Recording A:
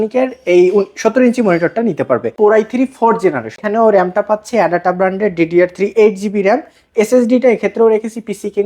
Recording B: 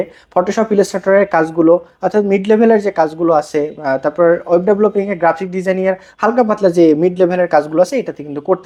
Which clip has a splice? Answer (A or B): A